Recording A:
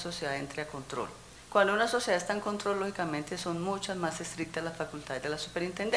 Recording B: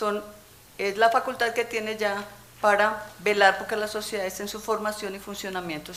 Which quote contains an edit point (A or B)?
A